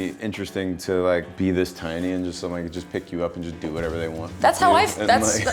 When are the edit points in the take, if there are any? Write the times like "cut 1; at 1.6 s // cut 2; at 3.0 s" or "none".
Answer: cut 1; at 1.3 s